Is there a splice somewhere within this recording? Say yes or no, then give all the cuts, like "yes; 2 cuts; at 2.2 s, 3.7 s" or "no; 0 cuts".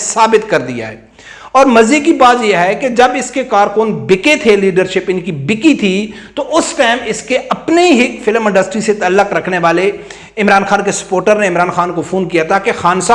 no; 0 cuts